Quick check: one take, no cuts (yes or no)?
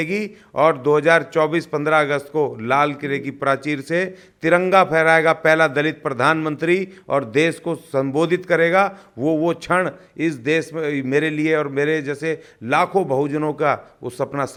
yes